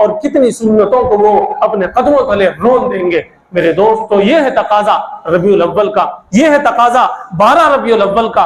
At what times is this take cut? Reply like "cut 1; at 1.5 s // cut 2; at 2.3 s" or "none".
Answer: none